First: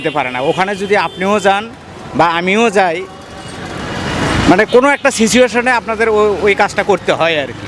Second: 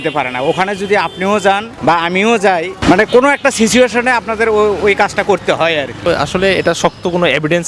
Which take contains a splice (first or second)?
second